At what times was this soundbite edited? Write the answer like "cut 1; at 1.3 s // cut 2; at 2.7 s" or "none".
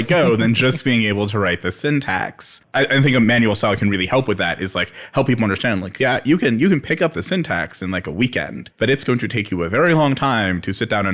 cut 1; at 2.6 s // cut 2; at 8.6 s

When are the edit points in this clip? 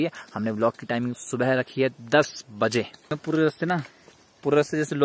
cut 1; at 3.0 s

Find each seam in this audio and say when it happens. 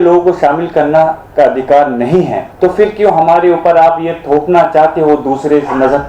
cut 1; at 2.4 s

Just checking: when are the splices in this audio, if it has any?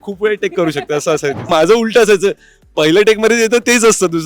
cut 1; at 1.5 s

